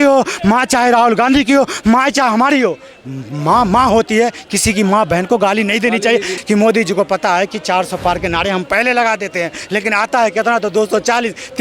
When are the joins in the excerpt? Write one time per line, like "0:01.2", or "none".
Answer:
0:06.3